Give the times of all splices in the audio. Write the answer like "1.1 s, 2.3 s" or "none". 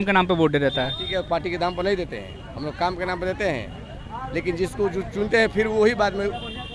none